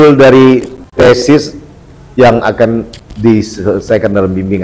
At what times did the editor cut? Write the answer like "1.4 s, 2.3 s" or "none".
1.3 s, 3.1 s